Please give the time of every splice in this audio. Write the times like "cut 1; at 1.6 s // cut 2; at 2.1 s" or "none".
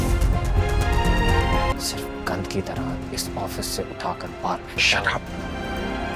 cut 1; at 1.7 s